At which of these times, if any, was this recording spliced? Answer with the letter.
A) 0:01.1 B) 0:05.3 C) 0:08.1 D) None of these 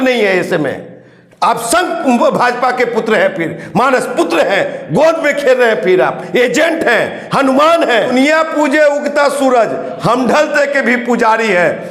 C